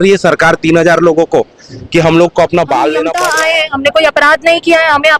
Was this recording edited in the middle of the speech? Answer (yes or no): yes